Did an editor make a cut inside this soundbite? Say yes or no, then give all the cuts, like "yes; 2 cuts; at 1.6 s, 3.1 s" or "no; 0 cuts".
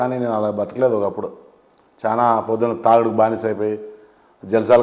no; 0 cuts